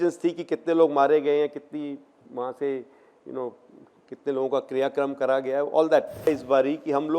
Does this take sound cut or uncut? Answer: cut